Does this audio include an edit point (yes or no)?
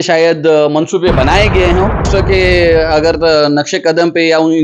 yes